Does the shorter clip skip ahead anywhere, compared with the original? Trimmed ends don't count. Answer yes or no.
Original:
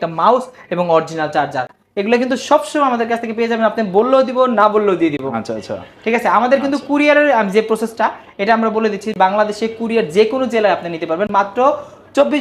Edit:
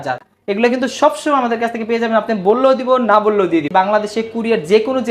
yes